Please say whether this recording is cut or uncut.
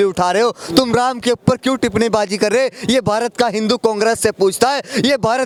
uncut